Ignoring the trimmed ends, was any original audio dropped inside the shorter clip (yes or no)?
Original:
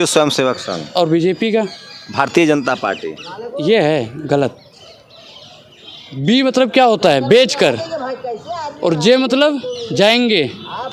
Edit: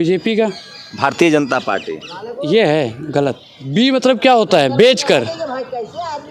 yes